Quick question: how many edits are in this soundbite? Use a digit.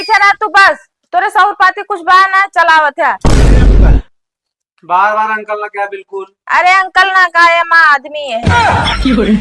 1